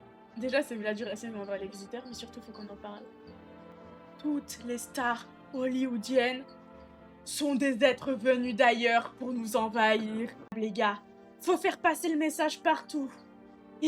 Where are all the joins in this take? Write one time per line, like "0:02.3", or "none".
0:10.5